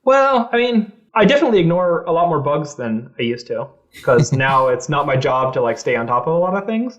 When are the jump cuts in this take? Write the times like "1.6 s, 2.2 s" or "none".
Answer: 1.0 s